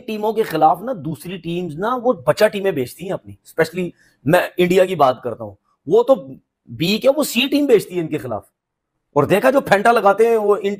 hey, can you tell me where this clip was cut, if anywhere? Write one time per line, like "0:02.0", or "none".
none